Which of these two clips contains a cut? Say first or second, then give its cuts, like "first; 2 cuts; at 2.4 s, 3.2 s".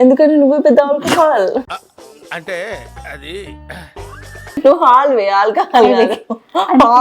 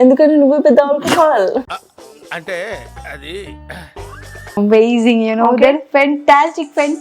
second; 1 cut; at 4.6 s